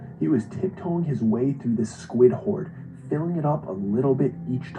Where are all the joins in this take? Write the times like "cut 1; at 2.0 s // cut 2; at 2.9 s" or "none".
none